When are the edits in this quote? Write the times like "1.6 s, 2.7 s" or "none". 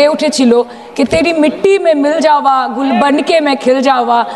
none